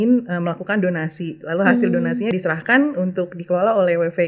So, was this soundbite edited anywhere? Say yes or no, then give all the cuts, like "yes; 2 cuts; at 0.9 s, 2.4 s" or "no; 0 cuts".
yes; 1 cut; at 2.3 s